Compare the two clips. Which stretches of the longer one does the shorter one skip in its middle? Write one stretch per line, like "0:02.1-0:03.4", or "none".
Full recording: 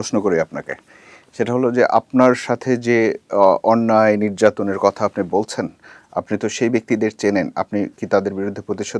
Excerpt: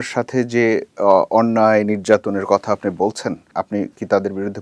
0:05.8-0:07.5